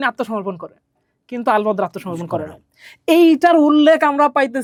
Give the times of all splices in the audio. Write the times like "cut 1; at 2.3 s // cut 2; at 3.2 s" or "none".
none